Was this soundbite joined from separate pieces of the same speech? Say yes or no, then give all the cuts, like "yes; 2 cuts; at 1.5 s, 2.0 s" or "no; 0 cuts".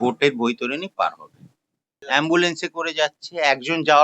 yes; 1 cut; at 2.0 s